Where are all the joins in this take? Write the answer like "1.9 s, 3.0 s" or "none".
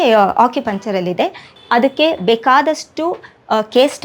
1.5 s